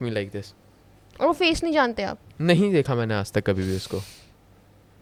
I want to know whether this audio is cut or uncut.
uncut